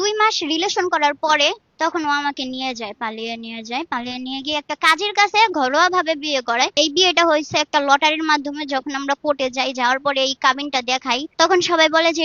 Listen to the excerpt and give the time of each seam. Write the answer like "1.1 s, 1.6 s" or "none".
1.7 s, 6.8 s, 11.3 s